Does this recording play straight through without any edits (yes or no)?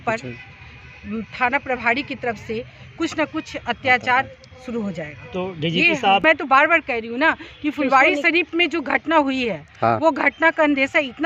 no